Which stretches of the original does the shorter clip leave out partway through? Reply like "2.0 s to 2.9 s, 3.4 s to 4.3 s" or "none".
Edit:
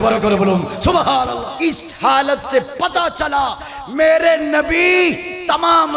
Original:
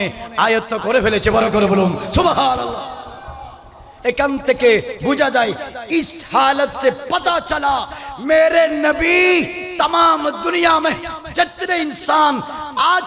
2.8 s to 5.8 s